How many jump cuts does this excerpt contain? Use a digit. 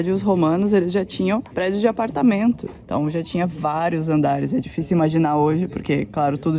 0